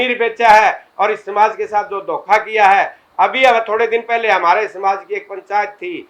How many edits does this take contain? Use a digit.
0